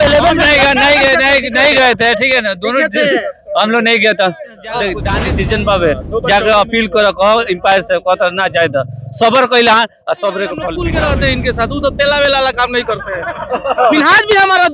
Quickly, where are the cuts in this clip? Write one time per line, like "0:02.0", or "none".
0:05.1
0:10.8